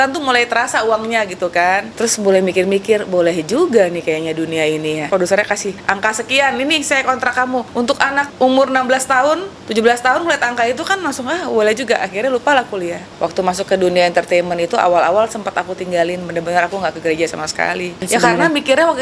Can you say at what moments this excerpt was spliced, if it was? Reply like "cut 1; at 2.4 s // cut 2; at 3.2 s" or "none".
cut 1; at 1.9 s // cut 2; at 5.1 s // cut 3; at 5.7 s // cut 4; at 7.8 s // cut 5; at 9.6 s // cut 6; at 13.0 s // cut 7; at 18.0 s